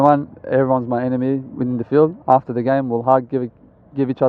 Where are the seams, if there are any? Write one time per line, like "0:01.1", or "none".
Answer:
none